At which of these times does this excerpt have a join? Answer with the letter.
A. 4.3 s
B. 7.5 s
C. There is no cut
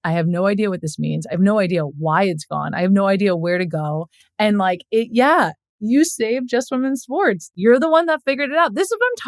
B